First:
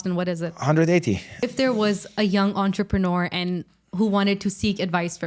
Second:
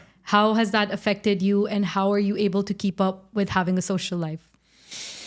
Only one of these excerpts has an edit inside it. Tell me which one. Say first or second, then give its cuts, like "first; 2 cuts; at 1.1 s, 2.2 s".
first; 1 cut; at 1.4 s